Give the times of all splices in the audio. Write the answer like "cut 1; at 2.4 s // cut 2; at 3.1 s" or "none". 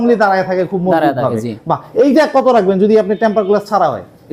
none